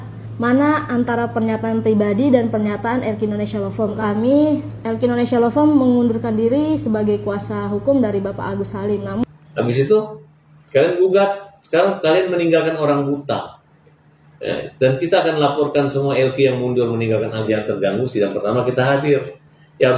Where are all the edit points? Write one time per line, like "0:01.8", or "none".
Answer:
0:04.0
0:09.2
0:17.5